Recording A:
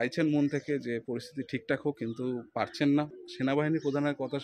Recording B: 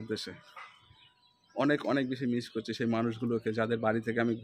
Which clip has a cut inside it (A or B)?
A